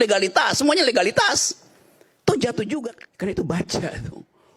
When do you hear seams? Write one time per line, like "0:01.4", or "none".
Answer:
0:03.0

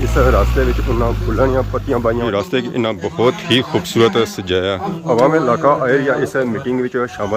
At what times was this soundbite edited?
0:02.2

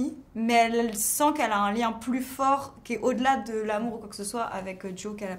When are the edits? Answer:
none

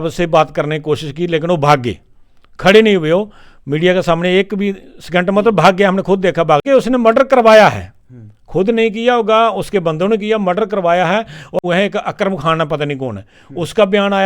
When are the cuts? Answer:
0:06.6
0:11.6

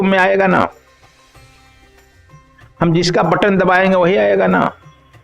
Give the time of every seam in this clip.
none

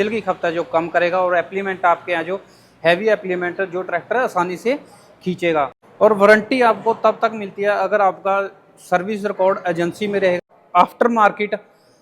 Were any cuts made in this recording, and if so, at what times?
0:05.8
0:10.4

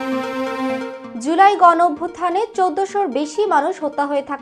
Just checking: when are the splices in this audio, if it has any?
0:01.0

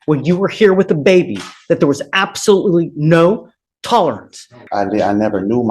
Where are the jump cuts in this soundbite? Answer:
0:04.6

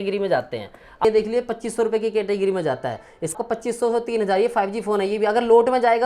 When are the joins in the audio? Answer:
0:01.0
0:03.3

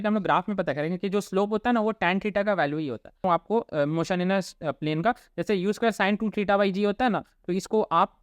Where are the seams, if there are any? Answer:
0:03.2

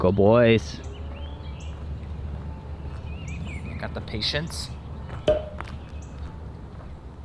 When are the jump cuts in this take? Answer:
none

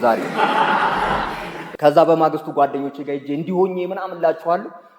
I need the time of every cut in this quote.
none

